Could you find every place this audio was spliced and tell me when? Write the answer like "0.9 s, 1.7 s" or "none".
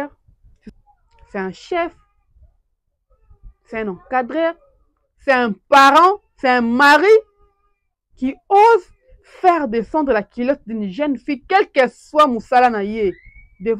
none